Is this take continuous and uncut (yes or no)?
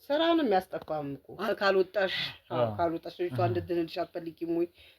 no